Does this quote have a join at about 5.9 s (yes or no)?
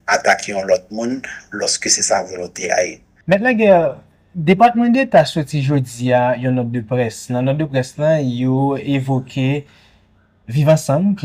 no